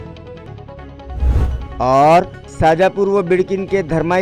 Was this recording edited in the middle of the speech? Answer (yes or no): yes